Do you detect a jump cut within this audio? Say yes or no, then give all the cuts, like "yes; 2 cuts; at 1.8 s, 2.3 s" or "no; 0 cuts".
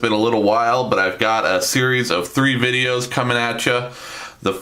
yes; 1 cut; at 2.3 s